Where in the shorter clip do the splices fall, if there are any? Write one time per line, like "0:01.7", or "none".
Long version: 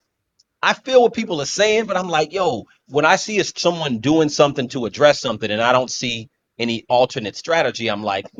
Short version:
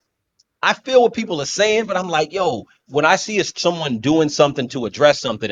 none

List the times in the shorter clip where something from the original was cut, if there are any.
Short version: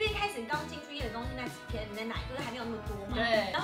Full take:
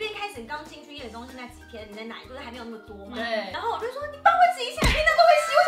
none

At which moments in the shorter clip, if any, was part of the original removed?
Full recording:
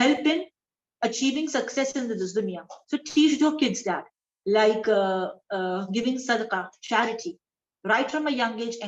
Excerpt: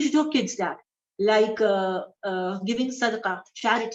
none

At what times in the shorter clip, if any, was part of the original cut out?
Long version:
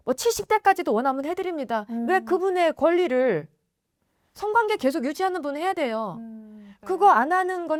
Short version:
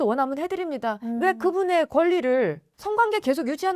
0:02.7

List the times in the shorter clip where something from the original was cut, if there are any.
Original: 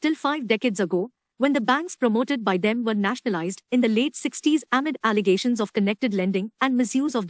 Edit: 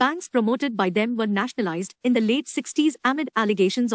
none

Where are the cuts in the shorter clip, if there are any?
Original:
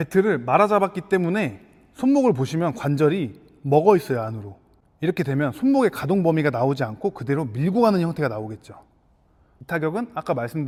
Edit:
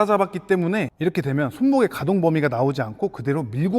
0:00.9

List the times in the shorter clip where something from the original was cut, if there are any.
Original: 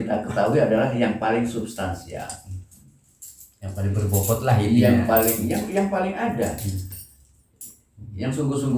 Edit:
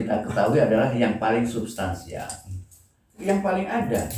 0:03.2

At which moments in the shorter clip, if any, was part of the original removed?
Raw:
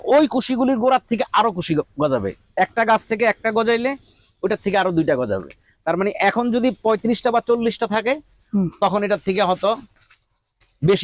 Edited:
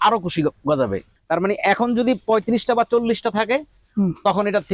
0:01.1

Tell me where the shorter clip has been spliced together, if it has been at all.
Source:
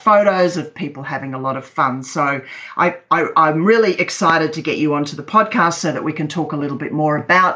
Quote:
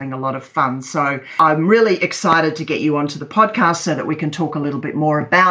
0:01.3

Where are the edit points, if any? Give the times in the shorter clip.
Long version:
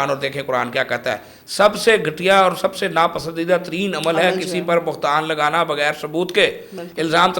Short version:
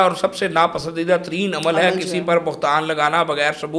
none

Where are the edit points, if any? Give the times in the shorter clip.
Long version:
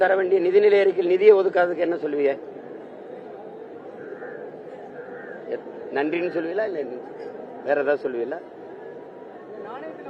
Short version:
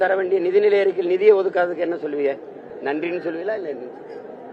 0:02.7

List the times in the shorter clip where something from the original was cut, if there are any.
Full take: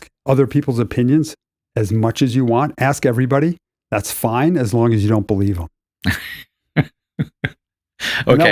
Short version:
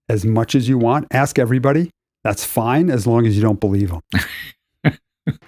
0:04.0

